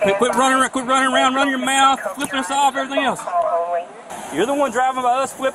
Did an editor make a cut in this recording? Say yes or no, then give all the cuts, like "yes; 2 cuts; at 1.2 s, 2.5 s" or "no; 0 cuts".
yes; 1 cut; at 4.0 s